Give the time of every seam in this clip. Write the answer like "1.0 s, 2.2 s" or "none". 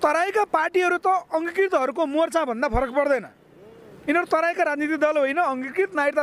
none